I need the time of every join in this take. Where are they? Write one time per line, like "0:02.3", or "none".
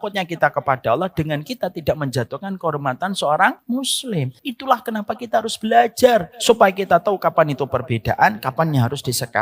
0:04.0
0:06.3